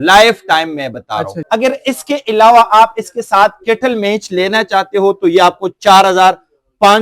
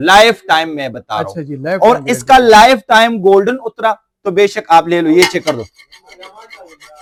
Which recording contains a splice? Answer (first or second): first